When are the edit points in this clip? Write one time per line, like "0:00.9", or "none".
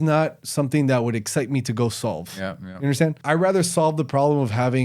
0:03.2